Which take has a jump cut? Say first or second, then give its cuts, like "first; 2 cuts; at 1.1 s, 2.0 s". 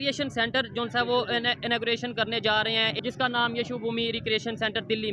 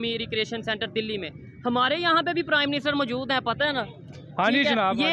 first; 1 cut; at 2.9 s